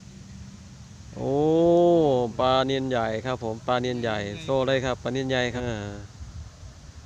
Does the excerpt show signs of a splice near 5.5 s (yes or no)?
yes